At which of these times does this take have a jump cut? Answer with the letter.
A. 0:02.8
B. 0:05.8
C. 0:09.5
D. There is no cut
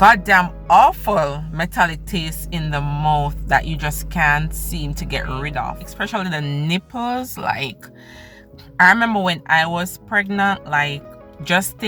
B